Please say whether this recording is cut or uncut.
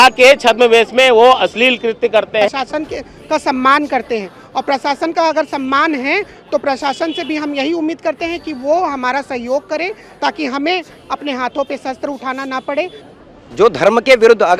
cut